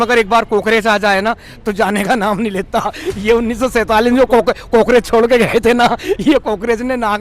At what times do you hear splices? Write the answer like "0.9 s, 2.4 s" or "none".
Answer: none